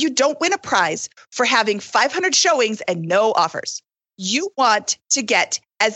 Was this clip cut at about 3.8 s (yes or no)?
yes